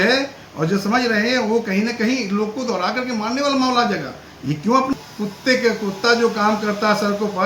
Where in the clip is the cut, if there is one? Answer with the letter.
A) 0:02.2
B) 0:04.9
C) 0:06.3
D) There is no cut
B